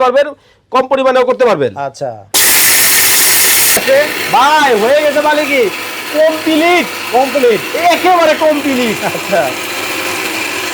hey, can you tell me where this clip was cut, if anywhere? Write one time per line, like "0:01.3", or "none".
0:03.8